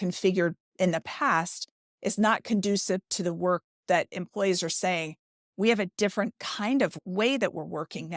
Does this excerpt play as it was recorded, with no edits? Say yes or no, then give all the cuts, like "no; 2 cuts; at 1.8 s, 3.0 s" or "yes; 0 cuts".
yes; 0 cuts